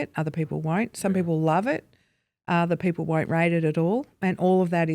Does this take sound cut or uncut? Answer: uncut